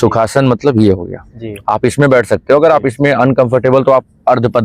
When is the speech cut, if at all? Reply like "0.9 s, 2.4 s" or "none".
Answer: none